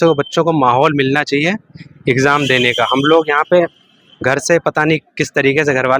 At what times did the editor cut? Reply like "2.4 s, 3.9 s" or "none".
none

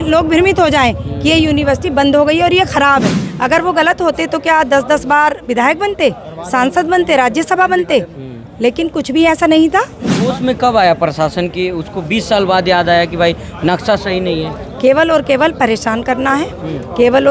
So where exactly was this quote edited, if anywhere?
3.2 s, 10.3 s

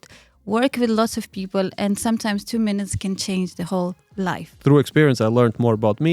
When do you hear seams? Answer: 4.5 s

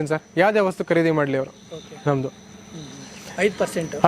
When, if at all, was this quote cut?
none

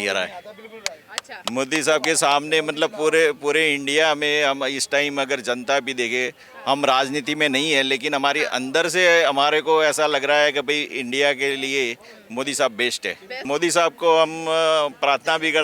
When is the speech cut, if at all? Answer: 13.3 s

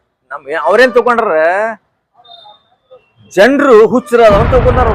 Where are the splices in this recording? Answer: none

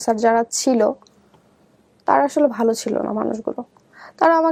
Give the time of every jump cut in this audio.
none

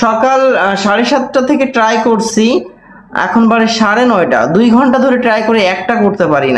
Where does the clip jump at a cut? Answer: none

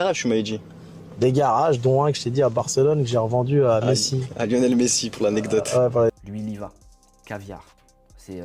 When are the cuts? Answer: 6.1 s

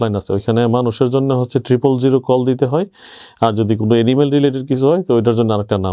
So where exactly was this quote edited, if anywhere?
none

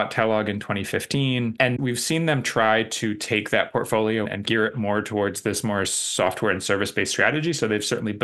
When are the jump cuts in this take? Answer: 1.7 s

